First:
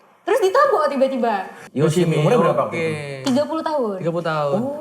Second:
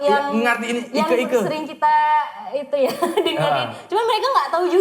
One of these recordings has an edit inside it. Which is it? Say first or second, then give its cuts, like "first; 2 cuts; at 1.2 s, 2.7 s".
first; 1 cut; at 1.6 s